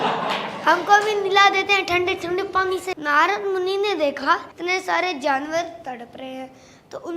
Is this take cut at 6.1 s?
no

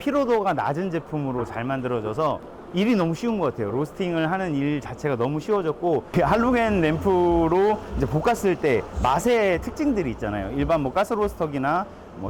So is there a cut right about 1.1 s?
no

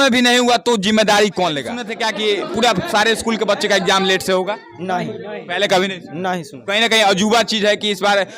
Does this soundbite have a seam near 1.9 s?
yes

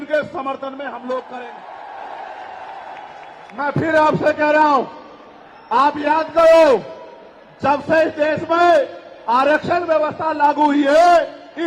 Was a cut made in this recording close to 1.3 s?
yes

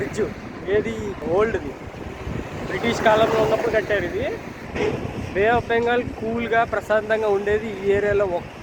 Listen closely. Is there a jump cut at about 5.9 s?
no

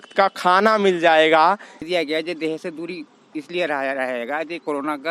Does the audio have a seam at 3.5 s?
no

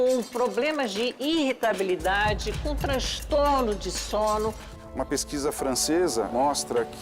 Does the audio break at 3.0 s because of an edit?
no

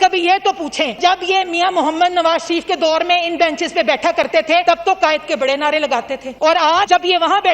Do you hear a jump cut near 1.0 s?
yes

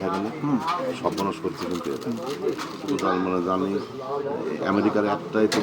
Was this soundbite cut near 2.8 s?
yes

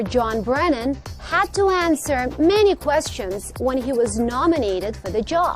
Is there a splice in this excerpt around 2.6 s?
yes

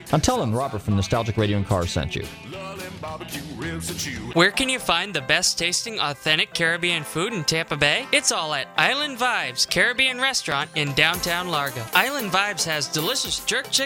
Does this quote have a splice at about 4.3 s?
yes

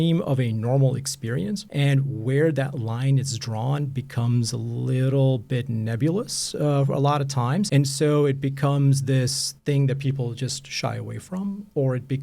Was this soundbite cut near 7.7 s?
yes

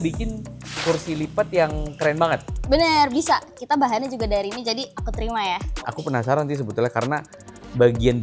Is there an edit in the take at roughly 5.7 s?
yes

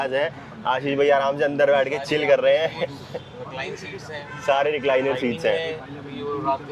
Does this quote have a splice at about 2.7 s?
no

